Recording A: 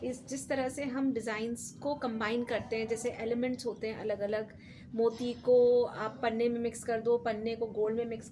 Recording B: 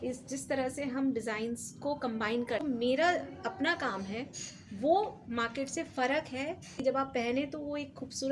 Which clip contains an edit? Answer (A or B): B